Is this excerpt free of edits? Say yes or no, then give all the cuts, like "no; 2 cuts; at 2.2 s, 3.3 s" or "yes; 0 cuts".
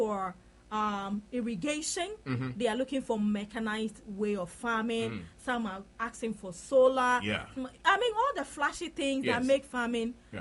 yes; 0 cuts